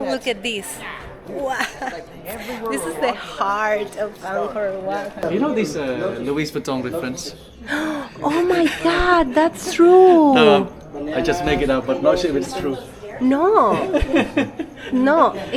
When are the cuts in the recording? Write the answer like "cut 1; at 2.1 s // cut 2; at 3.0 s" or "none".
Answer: cut 1; at 5.2 s